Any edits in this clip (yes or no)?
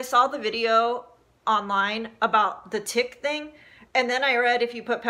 no